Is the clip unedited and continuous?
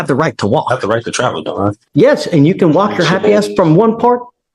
no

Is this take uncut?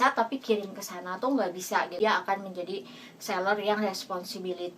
no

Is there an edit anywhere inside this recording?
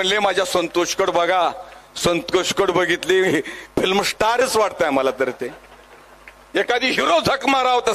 no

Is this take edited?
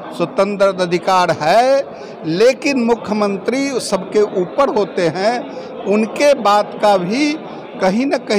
no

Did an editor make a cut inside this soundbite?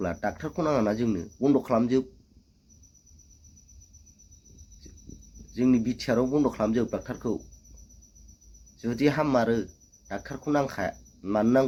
no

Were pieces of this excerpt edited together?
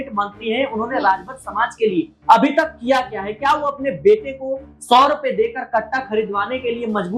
no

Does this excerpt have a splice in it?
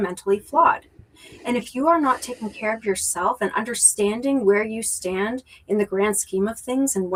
no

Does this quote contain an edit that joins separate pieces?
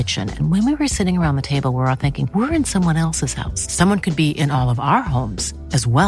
no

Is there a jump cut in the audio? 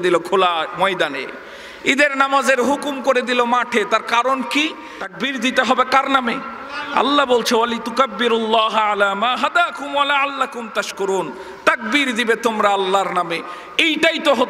yes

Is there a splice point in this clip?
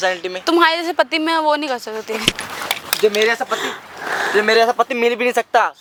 no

